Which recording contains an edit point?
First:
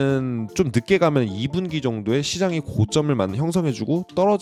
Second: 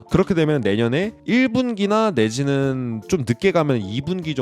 second; 1 cut; at 1.1 s

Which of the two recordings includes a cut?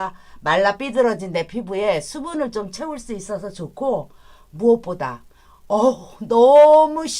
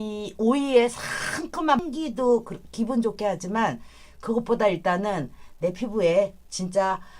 second; 1 cut; at 1.8 s

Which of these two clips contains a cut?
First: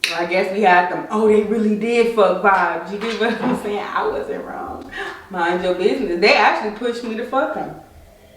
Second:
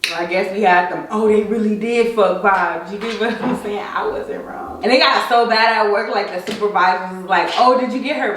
second; 1 cut; at 4.7 s

